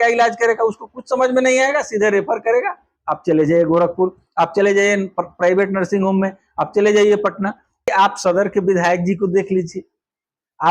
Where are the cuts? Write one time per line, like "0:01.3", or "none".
0:07.9